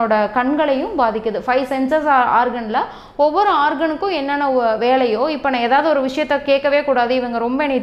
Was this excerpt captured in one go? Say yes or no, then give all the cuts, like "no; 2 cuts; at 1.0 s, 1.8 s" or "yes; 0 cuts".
yes; 0 cuts